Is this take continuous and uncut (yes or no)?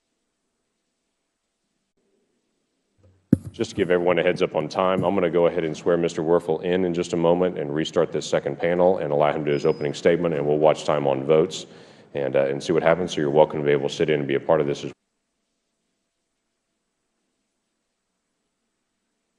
yes